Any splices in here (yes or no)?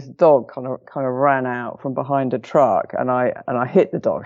no